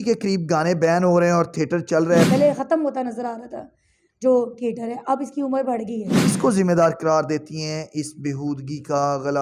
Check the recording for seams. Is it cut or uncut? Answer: cut